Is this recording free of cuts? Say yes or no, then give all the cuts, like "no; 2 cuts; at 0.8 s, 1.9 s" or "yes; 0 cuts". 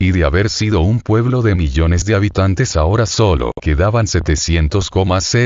yes; 0 cuts